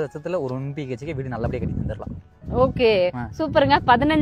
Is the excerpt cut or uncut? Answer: uncut